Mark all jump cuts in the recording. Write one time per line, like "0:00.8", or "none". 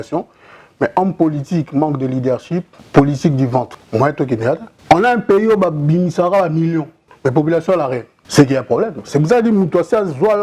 0:02.8
0:03.8
0:04.7
0:07.0
0:08.1